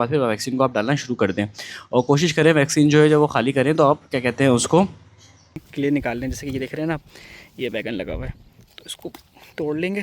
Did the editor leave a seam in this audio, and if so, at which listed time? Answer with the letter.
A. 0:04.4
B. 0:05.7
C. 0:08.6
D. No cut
B